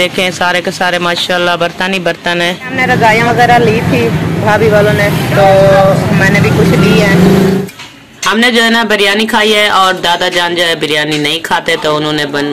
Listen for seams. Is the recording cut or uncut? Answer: cut